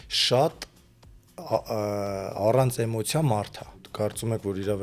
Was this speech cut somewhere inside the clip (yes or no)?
yes